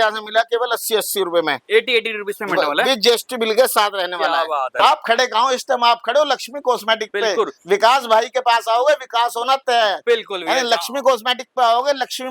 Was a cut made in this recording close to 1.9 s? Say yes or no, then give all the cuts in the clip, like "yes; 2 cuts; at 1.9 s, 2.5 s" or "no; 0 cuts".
no; 1 cut; at 4.8 s